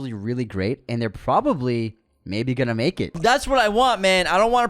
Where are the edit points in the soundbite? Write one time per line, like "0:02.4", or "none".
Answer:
0:03.1